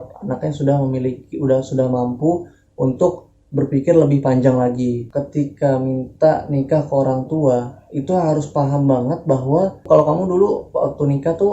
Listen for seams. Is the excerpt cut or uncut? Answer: cut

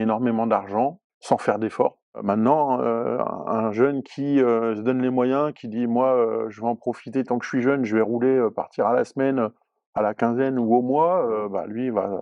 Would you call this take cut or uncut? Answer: cut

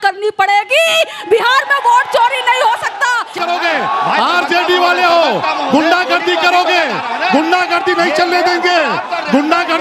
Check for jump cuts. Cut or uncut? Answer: cut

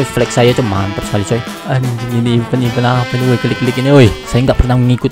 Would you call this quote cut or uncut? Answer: cut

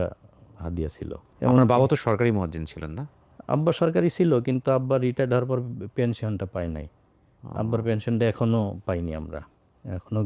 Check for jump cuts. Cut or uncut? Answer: uncut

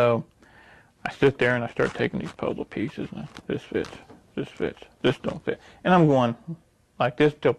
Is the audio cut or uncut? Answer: uncut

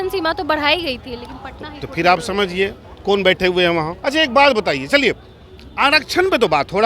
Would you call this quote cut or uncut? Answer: cut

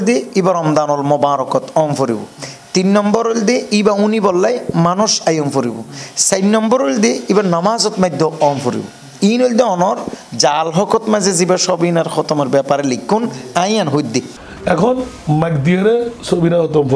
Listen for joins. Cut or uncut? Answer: cut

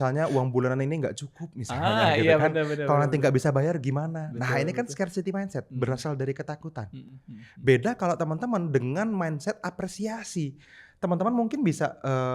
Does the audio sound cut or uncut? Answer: uncut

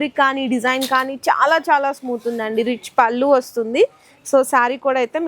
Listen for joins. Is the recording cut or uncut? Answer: uncut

